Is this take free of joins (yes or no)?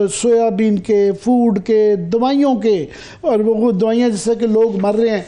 yes